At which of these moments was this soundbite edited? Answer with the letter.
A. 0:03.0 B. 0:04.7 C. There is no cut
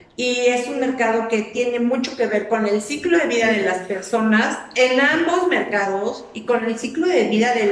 C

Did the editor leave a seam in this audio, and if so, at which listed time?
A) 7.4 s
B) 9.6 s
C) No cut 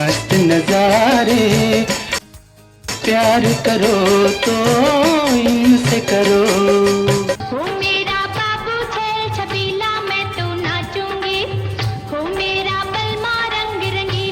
A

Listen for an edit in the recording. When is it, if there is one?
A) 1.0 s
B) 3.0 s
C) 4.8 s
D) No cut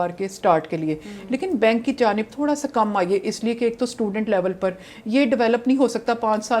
D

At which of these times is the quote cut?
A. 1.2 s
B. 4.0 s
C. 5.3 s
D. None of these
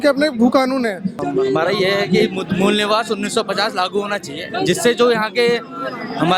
A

